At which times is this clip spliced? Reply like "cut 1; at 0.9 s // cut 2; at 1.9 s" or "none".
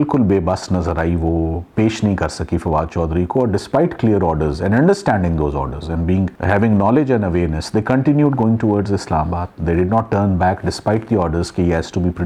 none